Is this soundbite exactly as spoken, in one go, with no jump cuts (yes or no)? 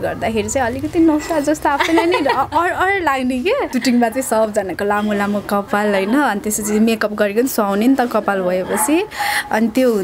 no